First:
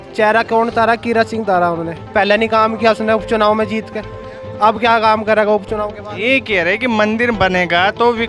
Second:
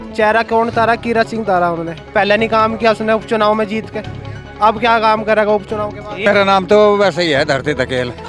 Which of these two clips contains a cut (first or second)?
second